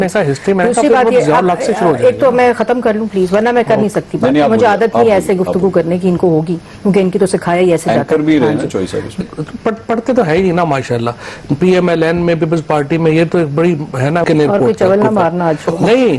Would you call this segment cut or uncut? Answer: cut